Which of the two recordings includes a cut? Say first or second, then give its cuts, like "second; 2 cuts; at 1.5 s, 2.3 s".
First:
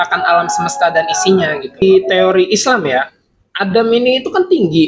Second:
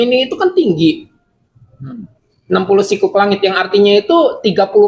first; 1 cut; at 1.8 s